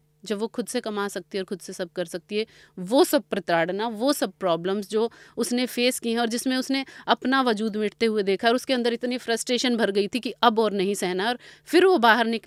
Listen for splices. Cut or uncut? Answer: uncut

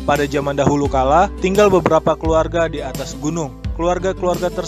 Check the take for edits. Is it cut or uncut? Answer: uncut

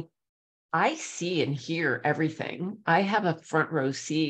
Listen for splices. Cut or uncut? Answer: uncut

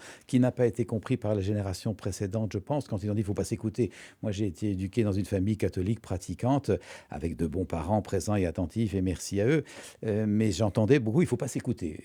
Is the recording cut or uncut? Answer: uncut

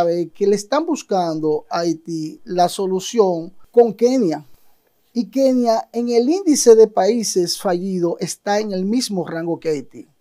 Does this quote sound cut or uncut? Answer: uncut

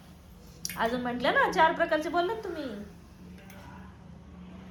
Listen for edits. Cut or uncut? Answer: uncut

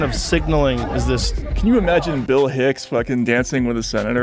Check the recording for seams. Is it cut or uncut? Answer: cut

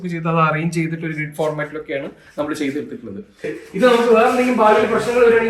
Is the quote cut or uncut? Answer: cut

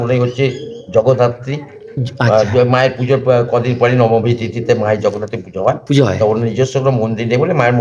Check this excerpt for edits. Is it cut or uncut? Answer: uncut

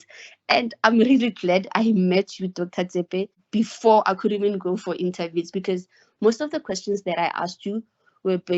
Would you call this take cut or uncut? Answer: cut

